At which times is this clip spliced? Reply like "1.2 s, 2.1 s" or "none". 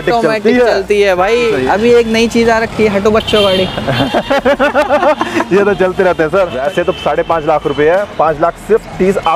1.5 s, 6.5 s